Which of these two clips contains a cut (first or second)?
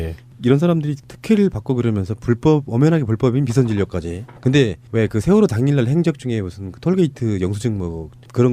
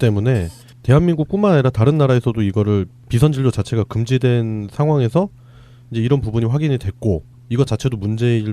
first